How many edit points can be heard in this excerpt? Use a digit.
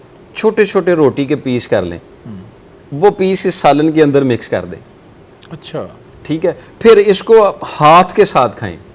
0